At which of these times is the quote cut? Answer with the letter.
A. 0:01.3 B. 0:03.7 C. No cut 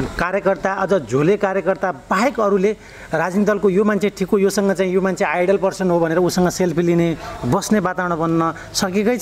C